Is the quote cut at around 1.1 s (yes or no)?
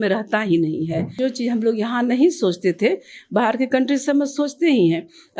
yes